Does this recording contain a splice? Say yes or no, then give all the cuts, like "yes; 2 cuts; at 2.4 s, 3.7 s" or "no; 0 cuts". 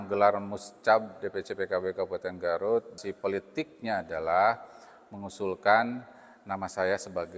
yes; 1 cut; at 3.0 s